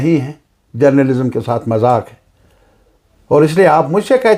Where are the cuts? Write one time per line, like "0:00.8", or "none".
none